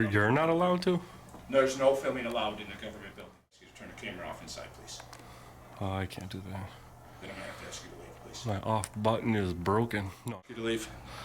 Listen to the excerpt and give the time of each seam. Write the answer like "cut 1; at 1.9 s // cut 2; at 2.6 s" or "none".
cut 1; at 3.6 s // cut 2; at 10.3 s